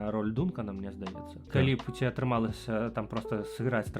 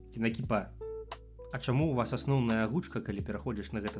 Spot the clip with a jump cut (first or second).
first